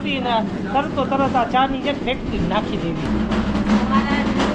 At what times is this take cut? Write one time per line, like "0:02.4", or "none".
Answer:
0:03.1